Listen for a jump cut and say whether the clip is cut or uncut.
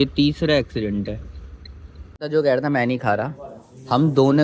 cut